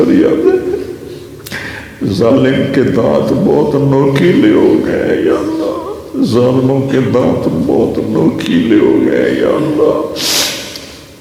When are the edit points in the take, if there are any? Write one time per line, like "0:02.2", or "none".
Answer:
none